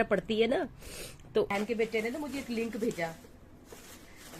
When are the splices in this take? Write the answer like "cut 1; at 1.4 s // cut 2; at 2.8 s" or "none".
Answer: cut 1; at 1.5 s

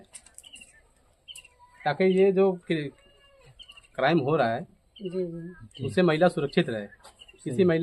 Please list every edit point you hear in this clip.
none

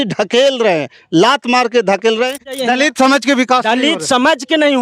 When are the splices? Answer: cut 1; at 2.6 s

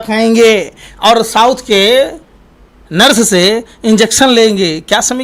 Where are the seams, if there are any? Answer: none

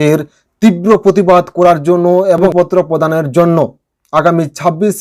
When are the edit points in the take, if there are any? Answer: none

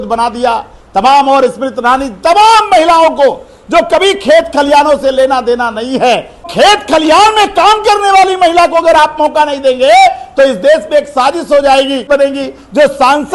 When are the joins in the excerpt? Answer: cut 1; at 6.5 s // cut 2; at 12.1 s

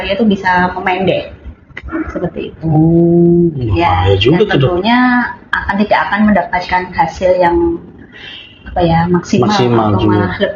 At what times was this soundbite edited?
none

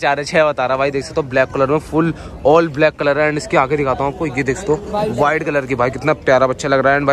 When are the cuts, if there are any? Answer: none

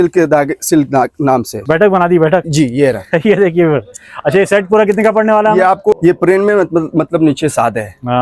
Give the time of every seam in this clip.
cut 1; at 1.6 s // cut 2; at 6.0 s

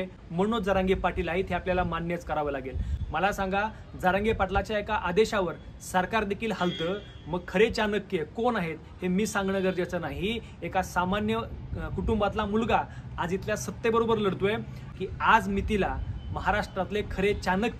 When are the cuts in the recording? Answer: cut 1; at 14.8 s

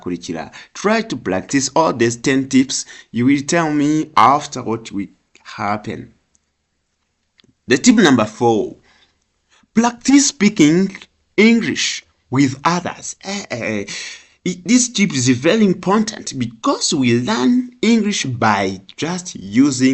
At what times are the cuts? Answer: none

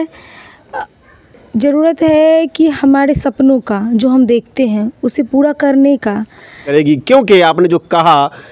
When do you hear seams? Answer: cut 1; at 6.6 s

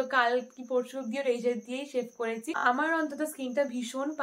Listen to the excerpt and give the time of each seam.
cut 1; at 2.5 s

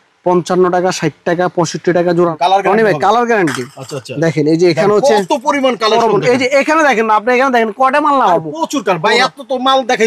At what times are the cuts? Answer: cut 1; at 2.3 s

